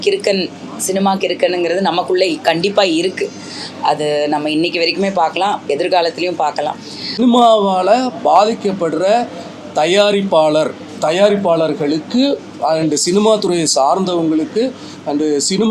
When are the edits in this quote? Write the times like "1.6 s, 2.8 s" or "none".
7.2 s